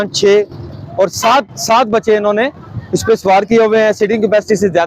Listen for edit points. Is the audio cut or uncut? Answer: uncut